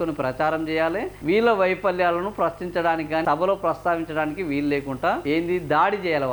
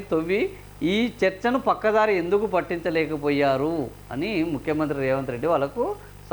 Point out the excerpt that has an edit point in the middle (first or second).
first